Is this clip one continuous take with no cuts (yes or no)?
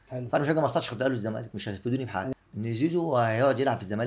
no